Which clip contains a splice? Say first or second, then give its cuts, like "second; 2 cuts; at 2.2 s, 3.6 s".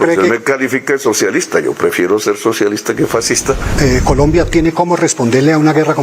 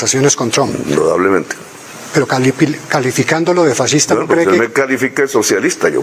first; 1 cut; at 3.7 s